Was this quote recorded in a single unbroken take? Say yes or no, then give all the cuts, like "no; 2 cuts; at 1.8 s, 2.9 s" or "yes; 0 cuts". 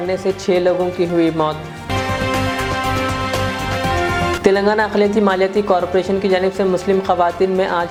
yes; 0 cuts